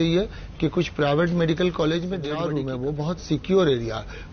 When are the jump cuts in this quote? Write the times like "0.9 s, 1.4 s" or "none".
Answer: 2.3 s